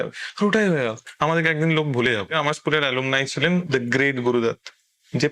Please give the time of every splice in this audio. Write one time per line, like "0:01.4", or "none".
0:01.0
0:02.3
0:03.7